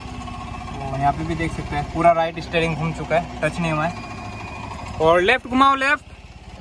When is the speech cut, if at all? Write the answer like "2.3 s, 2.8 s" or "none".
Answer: none